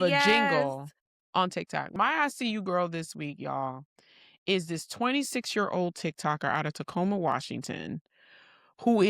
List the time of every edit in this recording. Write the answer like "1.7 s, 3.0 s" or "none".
1.9 s